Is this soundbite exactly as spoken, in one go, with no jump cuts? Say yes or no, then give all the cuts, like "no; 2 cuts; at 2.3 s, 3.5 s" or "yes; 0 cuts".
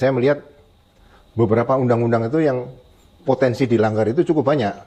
yes; 0 cuts